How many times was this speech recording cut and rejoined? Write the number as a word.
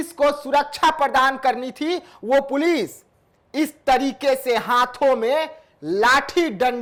zero